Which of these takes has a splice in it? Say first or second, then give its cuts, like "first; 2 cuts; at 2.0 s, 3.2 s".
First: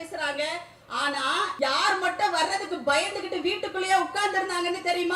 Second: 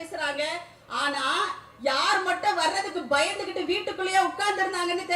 first; 1 cut; at 1.5 s